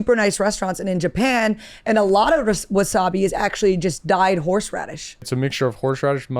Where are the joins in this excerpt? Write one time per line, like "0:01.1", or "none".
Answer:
0:05.3